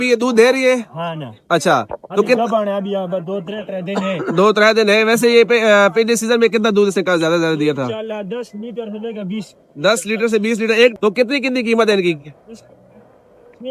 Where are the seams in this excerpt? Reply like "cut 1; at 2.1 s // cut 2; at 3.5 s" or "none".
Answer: cut 1; at 10.9 s